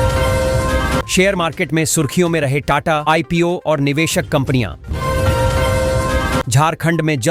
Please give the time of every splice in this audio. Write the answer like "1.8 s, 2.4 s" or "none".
none